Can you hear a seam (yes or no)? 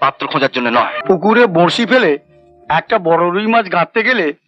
yes